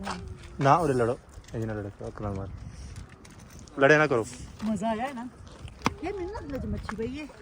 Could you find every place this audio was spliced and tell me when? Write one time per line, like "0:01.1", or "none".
none